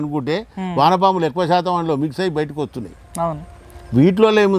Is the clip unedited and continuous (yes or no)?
yes